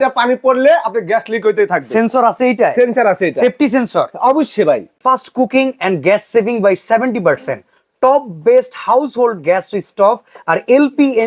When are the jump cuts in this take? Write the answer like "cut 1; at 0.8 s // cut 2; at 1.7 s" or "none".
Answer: cut 1; at 4.9 s